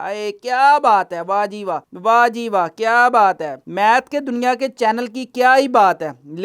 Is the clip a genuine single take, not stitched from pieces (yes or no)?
yes